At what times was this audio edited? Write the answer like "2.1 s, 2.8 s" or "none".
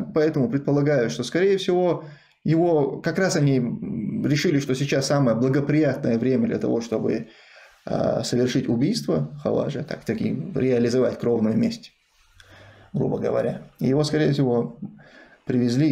none

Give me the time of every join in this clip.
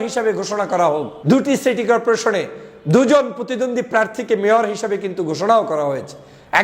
1.1 s

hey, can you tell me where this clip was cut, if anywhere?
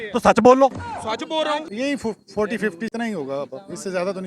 1.7 s, 2.9 s

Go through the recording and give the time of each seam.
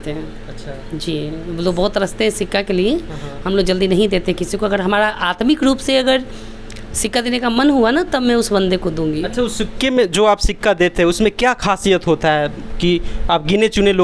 none

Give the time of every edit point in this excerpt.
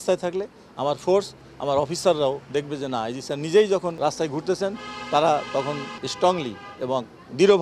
4.0 s, 6.0 s

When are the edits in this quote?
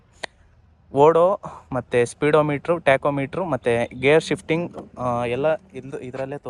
none

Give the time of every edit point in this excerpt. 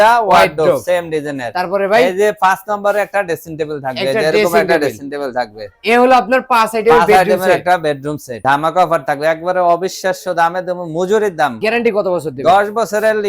8.3 s, 11.6 s

